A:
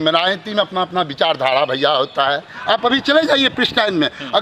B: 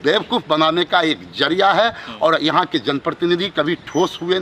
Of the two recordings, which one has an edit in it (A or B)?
A